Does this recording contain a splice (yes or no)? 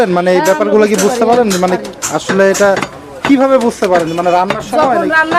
no